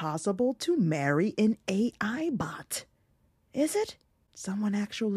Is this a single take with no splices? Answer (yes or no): yes